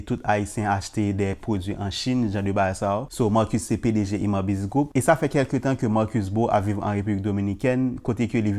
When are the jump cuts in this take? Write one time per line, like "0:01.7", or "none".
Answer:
0:03.1
0:04.9